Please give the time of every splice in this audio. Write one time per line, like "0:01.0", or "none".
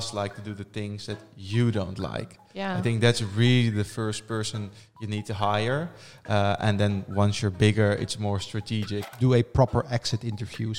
0:09.1